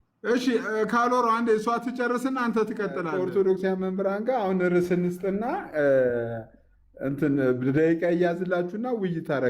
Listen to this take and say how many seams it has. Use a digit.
1